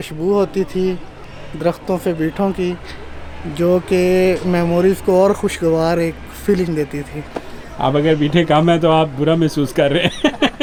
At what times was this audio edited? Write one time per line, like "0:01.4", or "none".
none